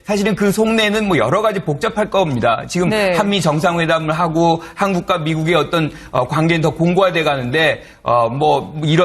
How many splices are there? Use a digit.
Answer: 1